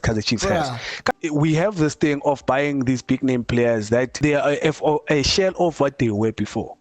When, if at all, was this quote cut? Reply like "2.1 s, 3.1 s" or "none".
1.1 s, 4.2 s